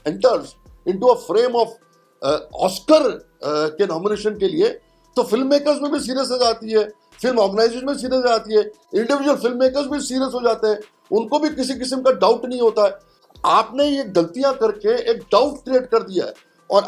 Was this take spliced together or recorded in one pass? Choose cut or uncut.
uncut